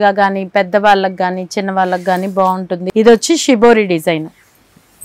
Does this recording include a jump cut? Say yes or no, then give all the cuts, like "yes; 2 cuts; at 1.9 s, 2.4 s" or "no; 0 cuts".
yes; 1 cut; at 2.8 s